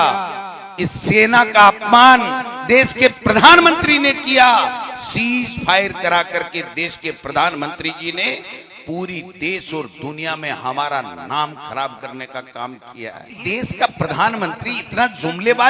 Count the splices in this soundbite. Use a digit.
1